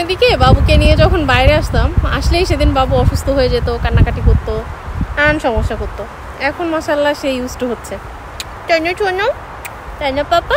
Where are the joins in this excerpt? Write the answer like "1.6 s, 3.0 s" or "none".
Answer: none